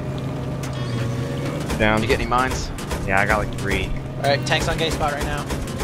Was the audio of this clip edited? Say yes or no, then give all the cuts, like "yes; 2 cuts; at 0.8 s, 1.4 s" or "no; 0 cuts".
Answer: yes; 1 cut; at 3.0 s